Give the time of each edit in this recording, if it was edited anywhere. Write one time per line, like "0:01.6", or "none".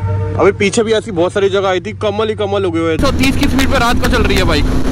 0:03.0